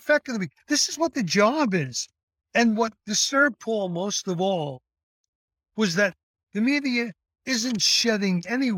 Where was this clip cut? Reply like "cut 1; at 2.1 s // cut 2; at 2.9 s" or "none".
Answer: cut 1; at 7.8 s